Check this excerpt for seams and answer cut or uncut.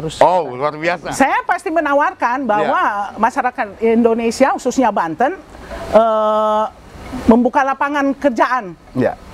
cut